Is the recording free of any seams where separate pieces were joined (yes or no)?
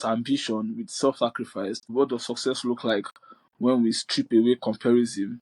no